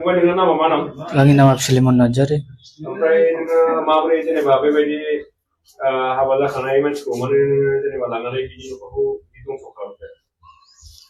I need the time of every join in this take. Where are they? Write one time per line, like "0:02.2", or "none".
none